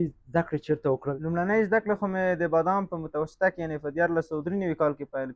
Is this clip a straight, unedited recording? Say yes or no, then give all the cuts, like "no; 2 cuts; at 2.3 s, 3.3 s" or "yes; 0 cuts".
no; 1 cut; at 1.1 s